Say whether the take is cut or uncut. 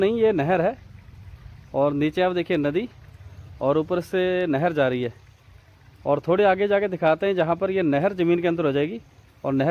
uncut